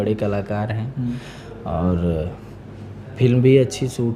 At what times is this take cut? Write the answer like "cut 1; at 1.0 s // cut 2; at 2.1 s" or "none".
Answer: none

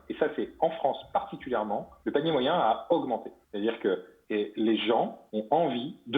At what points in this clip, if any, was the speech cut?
cut 1; at 1.9 s // cut 2; at 3.4 s // cut 3; at 4.1 s // cut 4; at 5.2 s

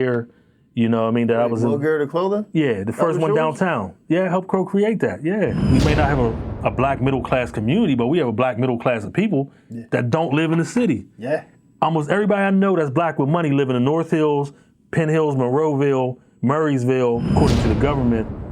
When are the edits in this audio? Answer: cut 1; at 5.6 s // cut 2; at 17.3 s

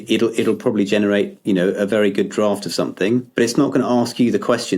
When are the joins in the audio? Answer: cut 1; at 3.3 s

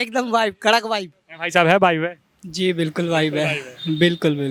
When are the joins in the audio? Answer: none

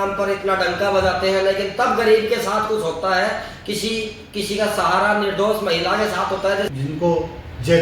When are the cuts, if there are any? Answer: cut 1; at 6.7 s

